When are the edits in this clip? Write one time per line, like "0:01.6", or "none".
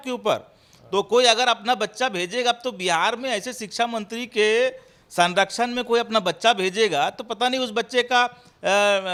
none

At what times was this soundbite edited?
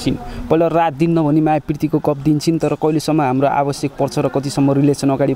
none

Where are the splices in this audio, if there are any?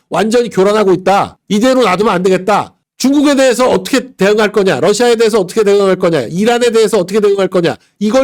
0:02.9

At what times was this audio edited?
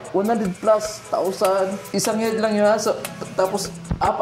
0:01.8

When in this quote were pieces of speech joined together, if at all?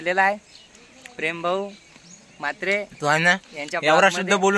none

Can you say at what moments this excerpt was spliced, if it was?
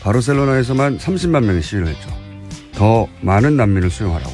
0:03.1

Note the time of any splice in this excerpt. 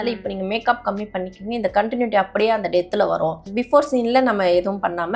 0:03.5

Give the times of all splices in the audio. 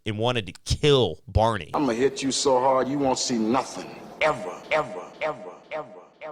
0:01.6

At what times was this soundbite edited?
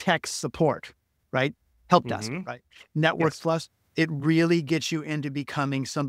none

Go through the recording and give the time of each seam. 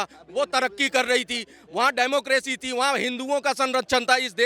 none

